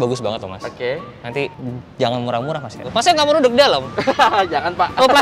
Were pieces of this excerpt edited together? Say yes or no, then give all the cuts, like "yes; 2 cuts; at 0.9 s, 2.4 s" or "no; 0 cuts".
yes; 2 cuts; at 1.6 s, 2.8 s